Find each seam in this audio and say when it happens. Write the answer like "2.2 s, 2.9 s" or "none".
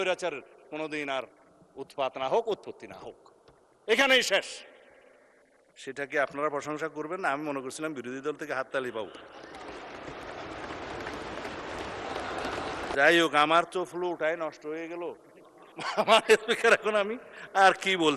12.9 s